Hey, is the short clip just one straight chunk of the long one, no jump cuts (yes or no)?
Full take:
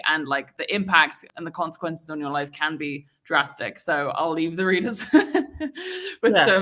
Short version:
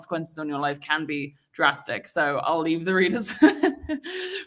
yes